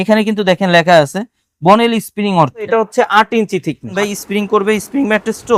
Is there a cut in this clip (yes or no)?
yes